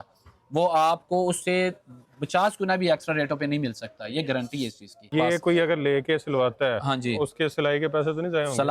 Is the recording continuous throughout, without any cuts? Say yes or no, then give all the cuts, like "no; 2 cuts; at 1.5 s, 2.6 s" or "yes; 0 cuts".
no; 1 cut; at 5.1 s